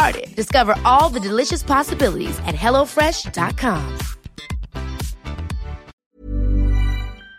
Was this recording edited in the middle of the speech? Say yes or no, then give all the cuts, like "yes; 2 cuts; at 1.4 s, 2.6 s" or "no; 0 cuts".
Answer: yes; 1 cut; at 5.9 s